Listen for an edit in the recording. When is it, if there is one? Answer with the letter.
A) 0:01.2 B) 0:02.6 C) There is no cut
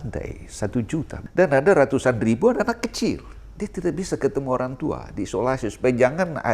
A